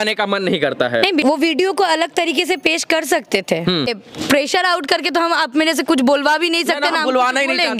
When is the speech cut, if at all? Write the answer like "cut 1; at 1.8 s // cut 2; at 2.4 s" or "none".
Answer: cut 1; at 1.2 s // cut 2; at 4.0 s